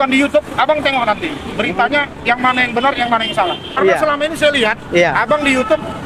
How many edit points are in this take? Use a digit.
1